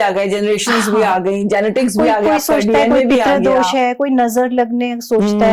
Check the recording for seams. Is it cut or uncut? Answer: uncut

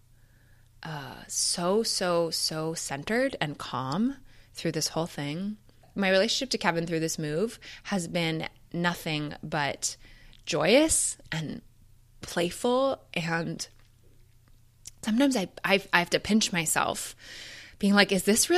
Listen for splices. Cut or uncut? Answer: cut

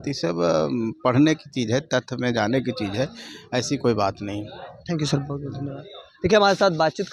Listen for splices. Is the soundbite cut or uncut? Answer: uncut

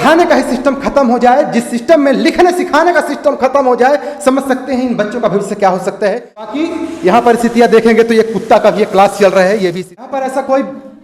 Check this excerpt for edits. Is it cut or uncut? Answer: cut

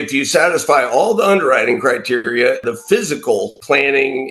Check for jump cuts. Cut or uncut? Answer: cut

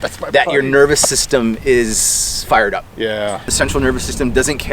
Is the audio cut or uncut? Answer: cut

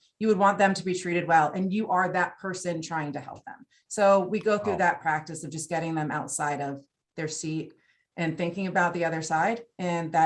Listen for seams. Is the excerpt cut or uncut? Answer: uncut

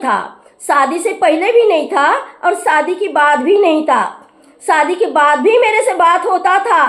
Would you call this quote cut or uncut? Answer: uncut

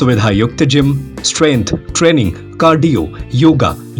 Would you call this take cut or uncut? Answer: uncut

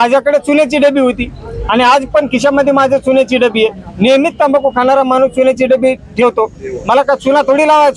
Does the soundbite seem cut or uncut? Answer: uncut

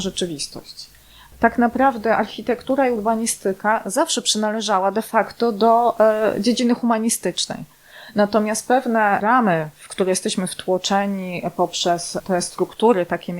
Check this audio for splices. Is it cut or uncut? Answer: cut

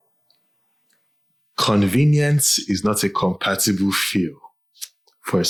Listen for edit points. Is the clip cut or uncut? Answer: uncut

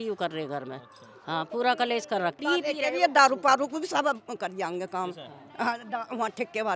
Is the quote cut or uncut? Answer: cut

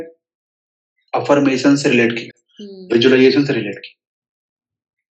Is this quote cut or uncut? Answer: uncut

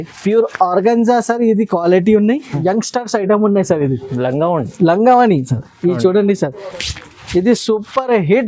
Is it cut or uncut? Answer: cut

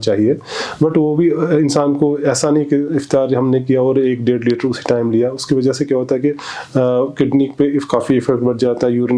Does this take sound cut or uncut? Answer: uncut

